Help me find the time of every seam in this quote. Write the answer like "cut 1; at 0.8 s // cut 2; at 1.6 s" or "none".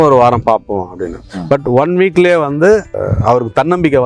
cut 1; at 3.0 s